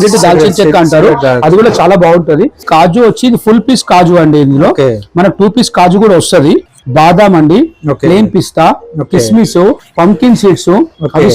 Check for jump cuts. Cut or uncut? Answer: cut